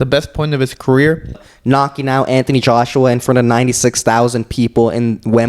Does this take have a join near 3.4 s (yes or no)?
no